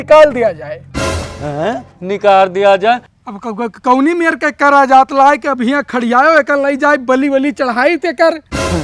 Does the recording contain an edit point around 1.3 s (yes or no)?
no